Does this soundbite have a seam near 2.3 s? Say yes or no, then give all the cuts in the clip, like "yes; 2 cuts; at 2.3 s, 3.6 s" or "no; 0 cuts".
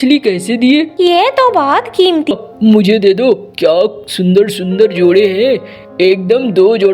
yes; 1 cut; at 2.3 s